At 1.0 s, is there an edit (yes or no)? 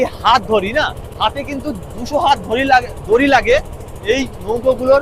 yes